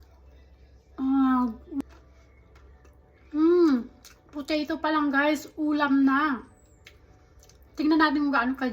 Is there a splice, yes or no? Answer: yes